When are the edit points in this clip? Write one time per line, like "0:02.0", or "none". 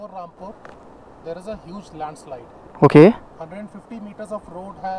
none